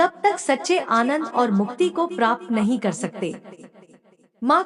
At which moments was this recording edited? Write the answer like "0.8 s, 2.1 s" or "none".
none